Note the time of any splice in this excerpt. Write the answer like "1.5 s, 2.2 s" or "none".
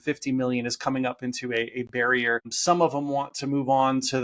2.5 s